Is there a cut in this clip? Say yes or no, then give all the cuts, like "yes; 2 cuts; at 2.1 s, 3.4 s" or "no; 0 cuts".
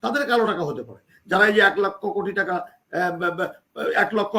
no; 0 cuts